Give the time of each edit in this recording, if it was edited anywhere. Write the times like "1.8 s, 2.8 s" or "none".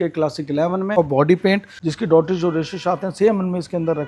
1.0 s, 1.8 s